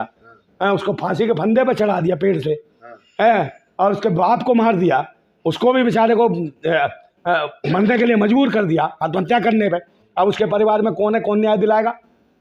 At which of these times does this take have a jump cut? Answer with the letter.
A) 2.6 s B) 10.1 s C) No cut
C